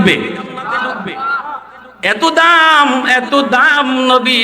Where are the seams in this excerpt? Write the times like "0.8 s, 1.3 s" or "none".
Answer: 1.8 s

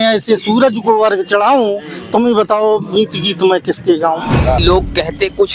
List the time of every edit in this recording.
4.6 s

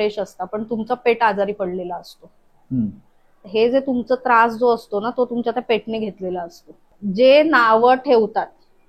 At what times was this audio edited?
7.0 s

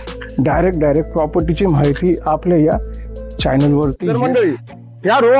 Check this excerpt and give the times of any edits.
4.0 s

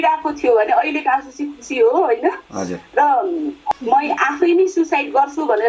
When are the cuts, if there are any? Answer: 3.6 s

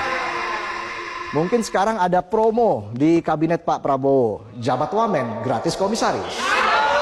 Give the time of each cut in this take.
none

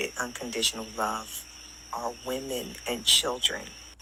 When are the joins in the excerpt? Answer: none

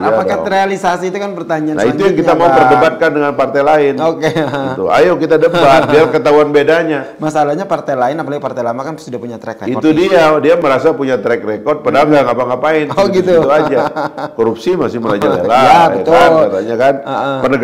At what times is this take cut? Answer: none

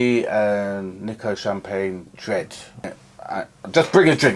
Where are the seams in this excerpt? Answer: 2.9 s

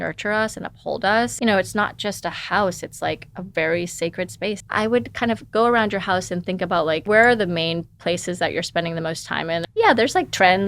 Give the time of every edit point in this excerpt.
1.3 s, 4.6 s, 7.0 s, 9.7 s

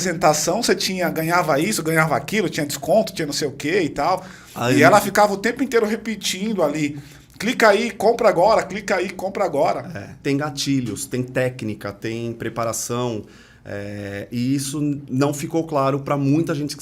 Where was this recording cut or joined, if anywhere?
10.1 s, 15.0 s

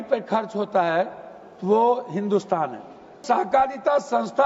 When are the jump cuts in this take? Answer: 3.2 s

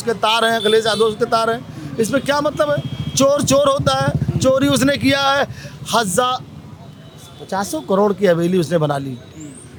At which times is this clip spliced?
none

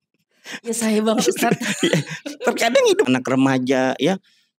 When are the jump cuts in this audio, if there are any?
3.1 s

